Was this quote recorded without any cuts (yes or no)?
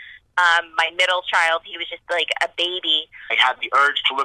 no